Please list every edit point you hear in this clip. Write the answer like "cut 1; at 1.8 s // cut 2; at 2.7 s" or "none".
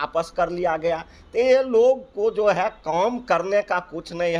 none